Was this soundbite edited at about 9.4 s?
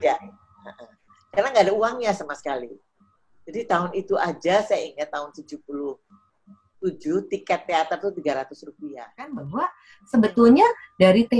yes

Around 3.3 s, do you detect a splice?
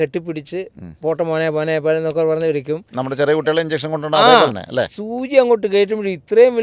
no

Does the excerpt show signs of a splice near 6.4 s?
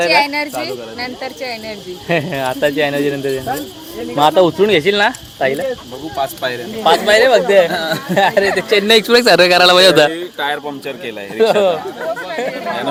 no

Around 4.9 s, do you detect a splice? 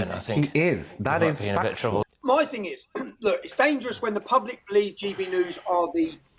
no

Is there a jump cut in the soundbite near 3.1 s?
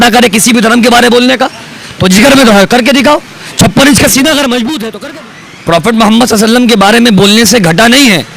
no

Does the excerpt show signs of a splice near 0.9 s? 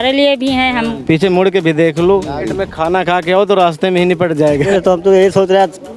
yes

